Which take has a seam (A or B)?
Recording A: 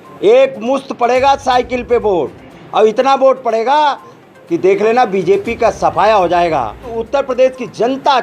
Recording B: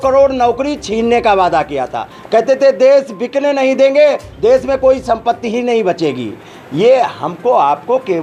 A